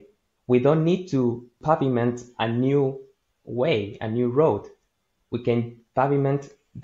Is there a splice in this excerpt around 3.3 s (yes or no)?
no